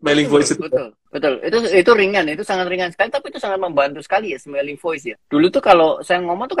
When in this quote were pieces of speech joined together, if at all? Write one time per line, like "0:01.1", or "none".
0:01.1